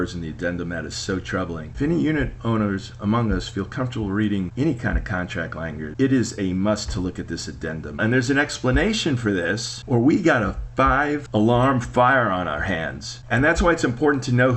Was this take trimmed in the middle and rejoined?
yes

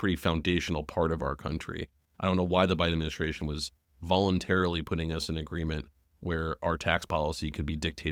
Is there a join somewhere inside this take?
no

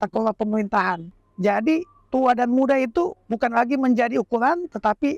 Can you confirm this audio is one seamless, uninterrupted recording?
no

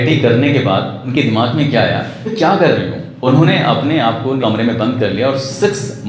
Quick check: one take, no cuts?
no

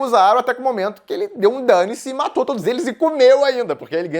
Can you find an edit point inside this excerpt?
no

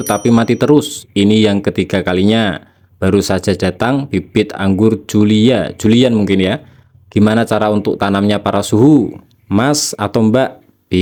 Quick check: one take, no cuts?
yes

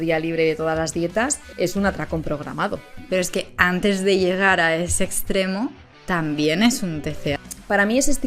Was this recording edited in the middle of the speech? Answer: yes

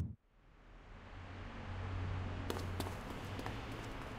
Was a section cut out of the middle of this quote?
no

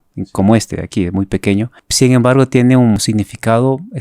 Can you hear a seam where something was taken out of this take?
yes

